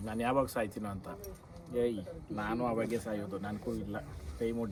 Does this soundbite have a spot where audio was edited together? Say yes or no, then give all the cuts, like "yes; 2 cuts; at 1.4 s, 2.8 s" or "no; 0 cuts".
no; 0 cuts